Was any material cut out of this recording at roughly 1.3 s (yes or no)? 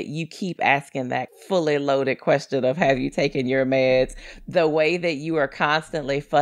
yes